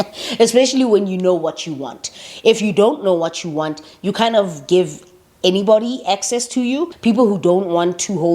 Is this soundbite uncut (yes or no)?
no